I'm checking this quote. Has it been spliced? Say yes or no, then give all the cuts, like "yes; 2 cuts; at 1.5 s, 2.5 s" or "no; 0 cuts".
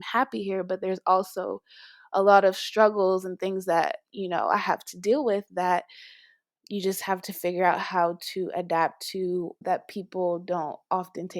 yes; 1 cut; at 9.5 s